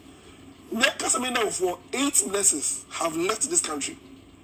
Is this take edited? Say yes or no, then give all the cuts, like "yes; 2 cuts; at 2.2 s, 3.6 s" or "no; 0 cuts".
no; 0 cuts